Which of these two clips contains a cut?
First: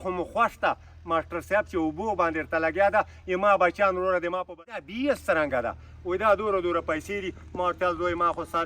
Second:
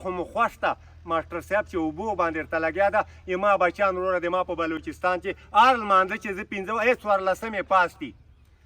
first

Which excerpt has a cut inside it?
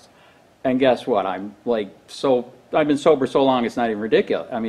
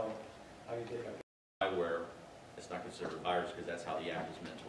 second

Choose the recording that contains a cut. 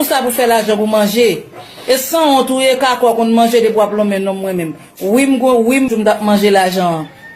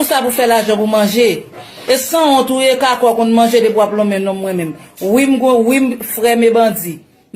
first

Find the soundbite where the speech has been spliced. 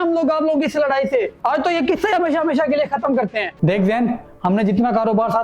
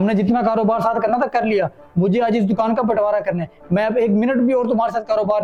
first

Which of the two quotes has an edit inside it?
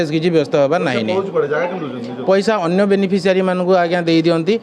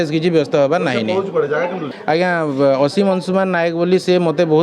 second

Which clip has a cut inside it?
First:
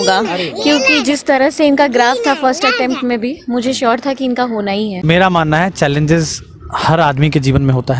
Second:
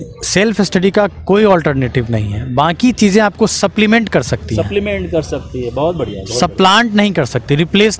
first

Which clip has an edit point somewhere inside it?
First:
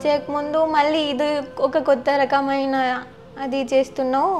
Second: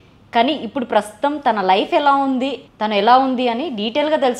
second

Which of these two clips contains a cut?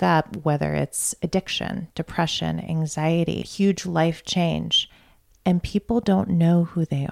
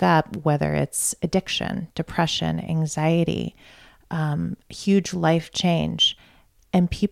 first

